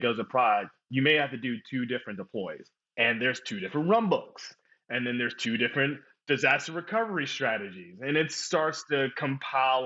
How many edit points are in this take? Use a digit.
1